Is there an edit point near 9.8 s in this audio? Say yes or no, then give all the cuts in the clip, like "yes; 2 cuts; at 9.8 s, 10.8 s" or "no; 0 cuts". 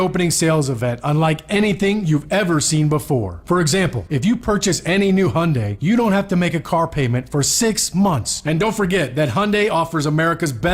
no; 2 cuts; at 4.0 s, 8.3 s